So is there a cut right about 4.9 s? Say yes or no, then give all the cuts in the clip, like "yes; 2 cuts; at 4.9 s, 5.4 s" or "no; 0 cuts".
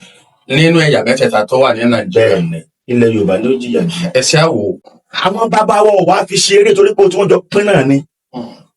yes; 1 cut; at 4.9 s